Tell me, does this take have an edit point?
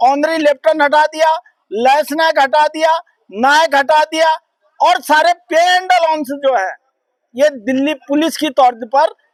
no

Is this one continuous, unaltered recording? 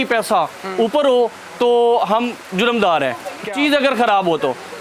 yes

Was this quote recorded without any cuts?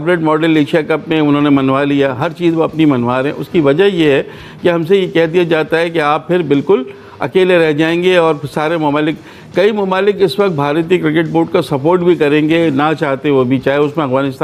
yes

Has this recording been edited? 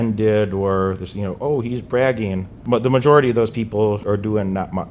yes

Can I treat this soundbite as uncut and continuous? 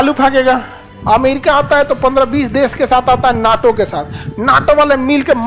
no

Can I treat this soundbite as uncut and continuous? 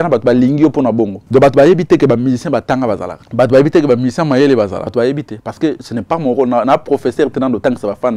no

